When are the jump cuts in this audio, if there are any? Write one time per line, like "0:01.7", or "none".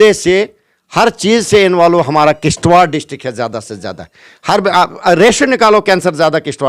none